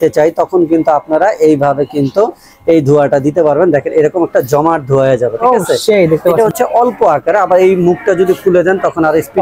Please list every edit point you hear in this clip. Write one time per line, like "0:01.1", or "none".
0:06.3